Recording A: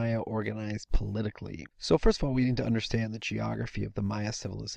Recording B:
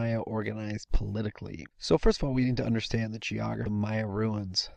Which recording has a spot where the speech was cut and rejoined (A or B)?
A